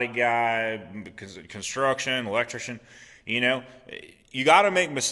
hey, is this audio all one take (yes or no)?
yes